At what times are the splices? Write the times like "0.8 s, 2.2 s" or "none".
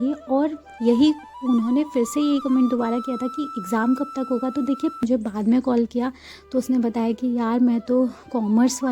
5.0 s